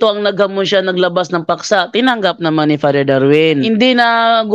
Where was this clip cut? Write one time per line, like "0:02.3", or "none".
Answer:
0:03.6